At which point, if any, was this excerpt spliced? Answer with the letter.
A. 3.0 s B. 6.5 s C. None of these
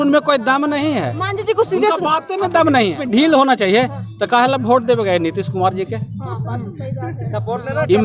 A